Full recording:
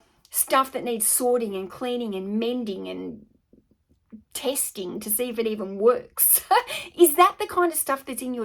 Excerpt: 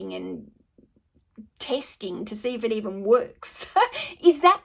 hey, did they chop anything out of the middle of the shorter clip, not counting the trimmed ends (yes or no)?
no